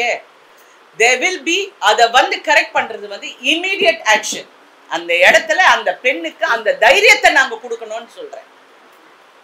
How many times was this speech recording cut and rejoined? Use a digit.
0